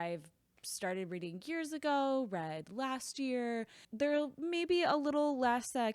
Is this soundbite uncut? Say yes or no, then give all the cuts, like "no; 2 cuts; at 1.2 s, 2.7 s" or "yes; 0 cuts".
no; 1 cut; at 3.8 s